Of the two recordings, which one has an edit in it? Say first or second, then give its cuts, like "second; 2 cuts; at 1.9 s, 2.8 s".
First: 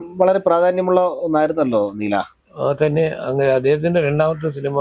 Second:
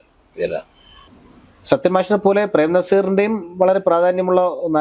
second; 1 cut; at 1.1 s